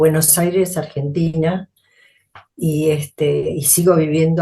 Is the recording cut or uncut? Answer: uncut